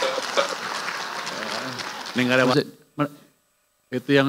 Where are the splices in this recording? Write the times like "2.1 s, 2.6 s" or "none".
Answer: 2.5 s